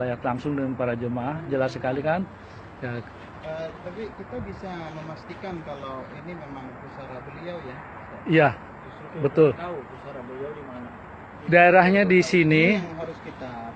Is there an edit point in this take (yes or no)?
no